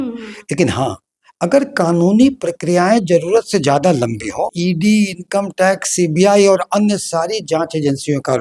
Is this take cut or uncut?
cut